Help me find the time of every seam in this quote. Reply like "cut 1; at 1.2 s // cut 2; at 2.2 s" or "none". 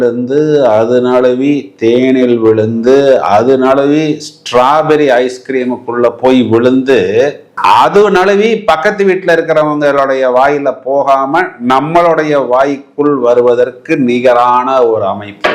none